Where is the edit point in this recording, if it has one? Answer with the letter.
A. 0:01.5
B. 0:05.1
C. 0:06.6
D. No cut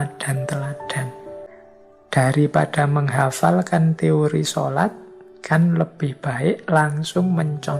A